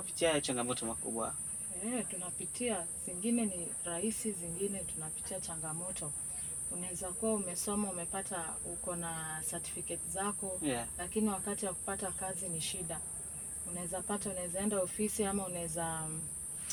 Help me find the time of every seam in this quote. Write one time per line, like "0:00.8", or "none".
none